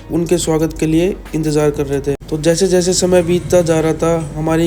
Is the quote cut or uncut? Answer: cut